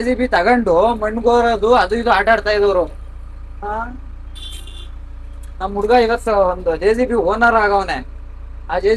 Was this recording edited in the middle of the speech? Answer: no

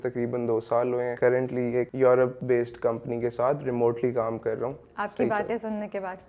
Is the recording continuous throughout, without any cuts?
no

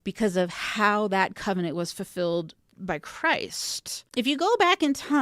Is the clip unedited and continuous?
no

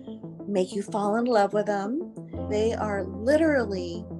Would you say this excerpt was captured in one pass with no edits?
no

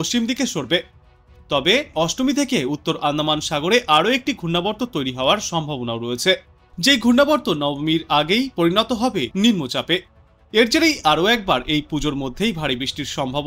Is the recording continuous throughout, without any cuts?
no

